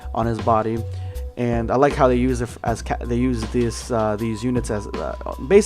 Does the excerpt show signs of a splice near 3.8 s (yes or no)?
no